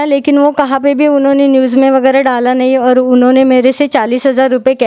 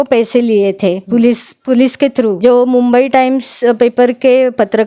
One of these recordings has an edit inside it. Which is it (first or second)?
second